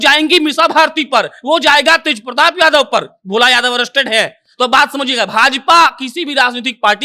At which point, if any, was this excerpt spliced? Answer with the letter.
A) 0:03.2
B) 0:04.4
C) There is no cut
C